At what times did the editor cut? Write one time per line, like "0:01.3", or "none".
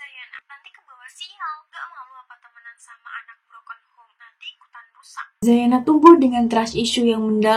0:05.2